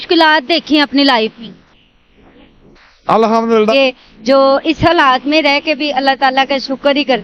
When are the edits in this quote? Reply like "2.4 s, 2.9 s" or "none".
3.7 s